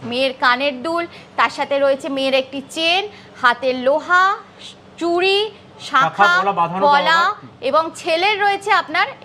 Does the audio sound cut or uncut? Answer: uncut